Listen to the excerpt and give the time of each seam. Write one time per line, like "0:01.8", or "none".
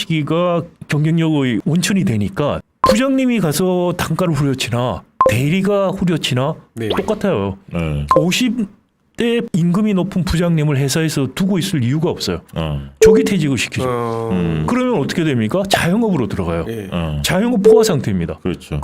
0:01.6
0:02.7
0:09.5